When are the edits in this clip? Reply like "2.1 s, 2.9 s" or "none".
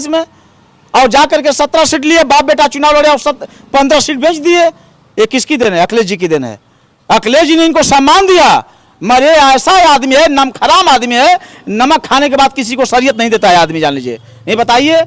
none